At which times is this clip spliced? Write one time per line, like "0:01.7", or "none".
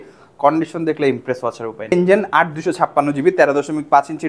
0:01.9